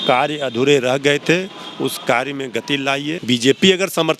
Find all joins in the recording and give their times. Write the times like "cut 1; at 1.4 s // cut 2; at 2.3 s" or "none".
cut 1; at 3.2 s